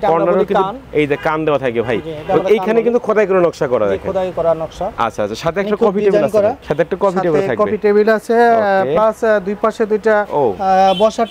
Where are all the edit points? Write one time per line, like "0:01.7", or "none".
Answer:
none